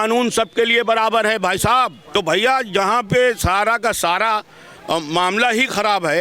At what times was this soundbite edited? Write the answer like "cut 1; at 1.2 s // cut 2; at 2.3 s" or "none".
cut 1; at 2.0 s